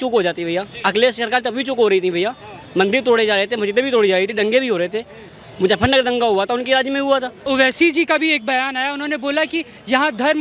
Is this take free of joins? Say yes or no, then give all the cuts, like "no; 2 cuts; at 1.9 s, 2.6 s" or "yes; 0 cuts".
no; 1 cut; at 7.4 s